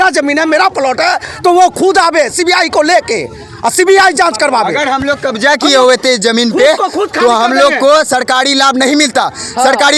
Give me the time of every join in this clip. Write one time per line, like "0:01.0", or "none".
none